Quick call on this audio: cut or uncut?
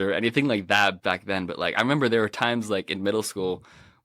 cut